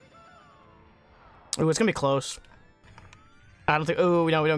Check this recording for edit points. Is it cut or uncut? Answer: cut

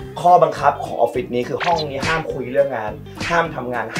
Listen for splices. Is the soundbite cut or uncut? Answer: cut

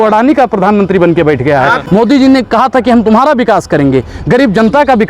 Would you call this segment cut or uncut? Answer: cut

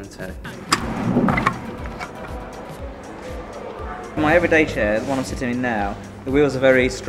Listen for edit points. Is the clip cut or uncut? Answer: cut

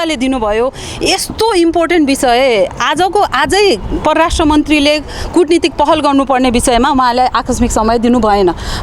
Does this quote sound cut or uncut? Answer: uncut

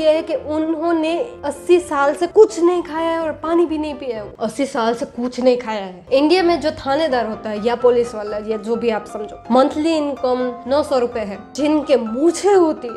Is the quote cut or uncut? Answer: cut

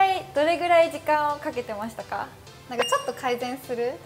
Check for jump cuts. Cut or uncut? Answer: cut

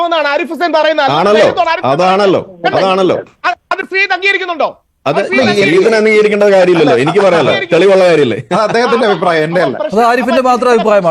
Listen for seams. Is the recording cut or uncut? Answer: uncut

